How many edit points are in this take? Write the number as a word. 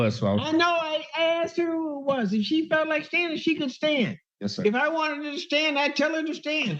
zero